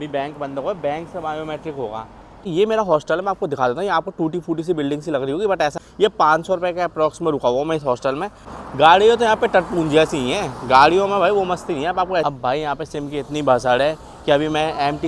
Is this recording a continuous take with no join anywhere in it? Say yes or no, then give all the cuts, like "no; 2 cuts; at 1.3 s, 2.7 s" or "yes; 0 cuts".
no; 4 cuts; at 2.5 s, 5.8 s, 8.6 s, 12.2 s